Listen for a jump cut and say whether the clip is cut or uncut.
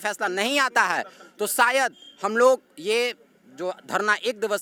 uncut